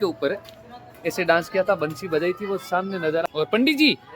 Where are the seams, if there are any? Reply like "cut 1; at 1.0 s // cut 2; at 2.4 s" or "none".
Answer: cut 1; at 3.2 s